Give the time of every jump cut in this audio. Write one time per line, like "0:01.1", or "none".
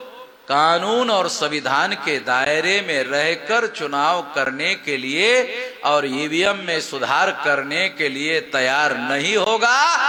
none